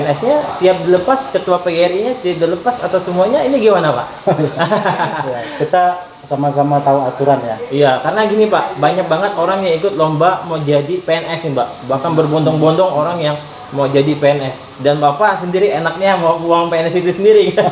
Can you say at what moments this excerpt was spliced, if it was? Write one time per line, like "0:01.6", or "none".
none

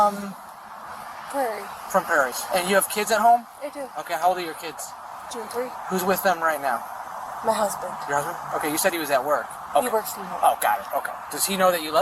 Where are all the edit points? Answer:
0:02.4
0:09.6

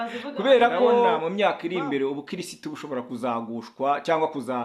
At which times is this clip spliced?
0:01.2

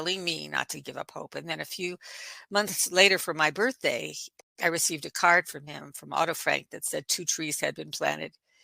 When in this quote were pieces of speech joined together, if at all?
0:04.4

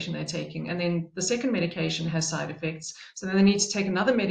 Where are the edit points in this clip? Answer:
none

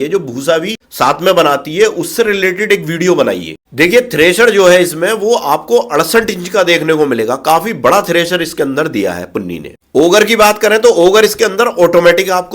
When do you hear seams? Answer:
0:03.7

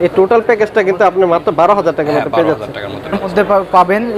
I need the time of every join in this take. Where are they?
0:03.2

